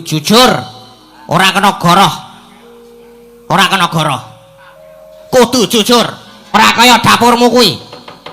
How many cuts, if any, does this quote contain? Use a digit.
1